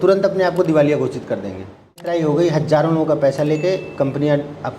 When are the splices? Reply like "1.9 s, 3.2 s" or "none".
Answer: 2.1 s